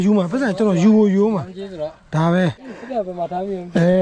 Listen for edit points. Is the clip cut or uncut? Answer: uncut